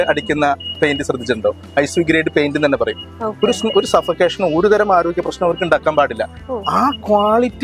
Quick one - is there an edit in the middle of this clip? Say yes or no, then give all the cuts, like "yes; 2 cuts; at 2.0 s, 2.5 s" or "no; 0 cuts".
no; 0 cuts